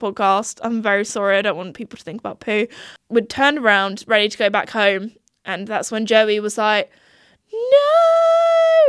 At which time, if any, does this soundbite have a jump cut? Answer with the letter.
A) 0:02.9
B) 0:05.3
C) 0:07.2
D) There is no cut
A